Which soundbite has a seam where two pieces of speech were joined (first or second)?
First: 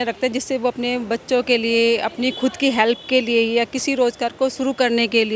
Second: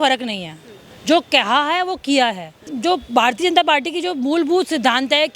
second